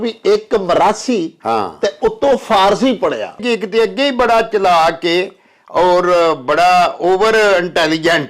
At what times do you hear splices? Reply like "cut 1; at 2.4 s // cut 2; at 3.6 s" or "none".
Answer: cut 1; at 3.4 s